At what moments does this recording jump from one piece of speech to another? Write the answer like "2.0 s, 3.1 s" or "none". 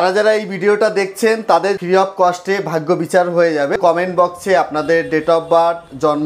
1.8 s, 3.7 s